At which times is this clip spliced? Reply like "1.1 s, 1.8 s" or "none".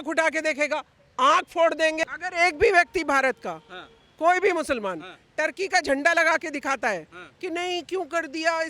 2.0 s